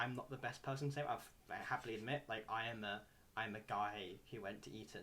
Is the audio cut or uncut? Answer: uncut